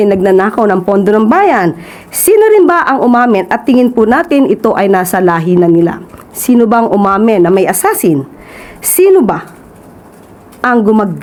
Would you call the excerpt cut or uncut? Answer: uncut